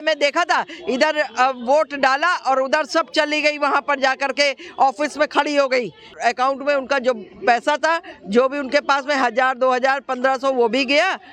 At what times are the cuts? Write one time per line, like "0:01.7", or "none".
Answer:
0:06.1